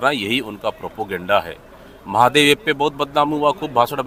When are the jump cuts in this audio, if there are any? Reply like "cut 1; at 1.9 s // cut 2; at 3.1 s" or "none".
none